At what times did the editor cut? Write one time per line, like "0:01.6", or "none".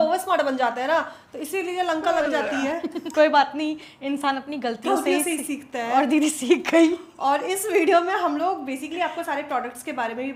none